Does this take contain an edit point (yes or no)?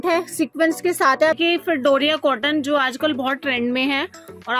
yes